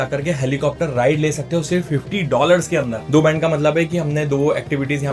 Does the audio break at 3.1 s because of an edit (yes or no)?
yes